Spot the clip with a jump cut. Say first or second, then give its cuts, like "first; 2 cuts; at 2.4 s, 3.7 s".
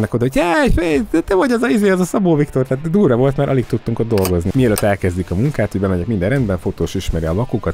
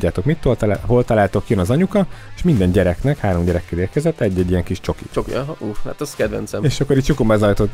first; 1 cut; at 4.5 s